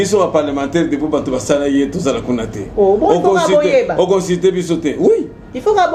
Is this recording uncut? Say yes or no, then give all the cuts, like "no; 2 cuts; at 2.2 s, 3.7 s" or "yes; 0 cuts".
yes; 0 cuts